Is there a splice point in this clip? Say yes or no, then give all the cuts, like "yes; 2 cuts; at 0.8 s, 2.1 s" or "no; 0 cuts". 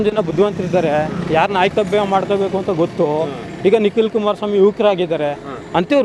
no; 0 cuts